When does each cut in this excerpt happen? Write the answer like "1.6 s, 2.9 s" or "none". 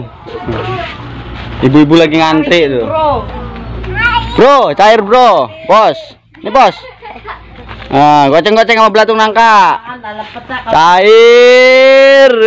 none